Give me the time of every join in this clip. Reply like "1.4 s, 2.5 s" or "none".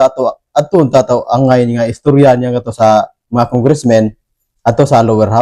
none